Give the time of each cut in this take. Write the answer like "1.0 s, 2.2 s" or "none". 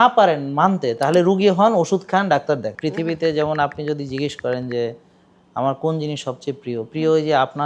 2.8 s